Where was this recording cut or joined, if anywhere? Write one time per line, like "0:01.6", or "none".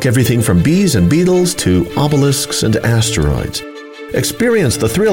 none